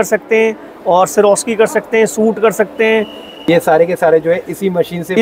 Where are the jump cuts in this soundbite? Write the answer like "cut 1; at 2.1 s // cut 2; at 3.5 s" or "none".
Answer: cut 1; at 3.5 s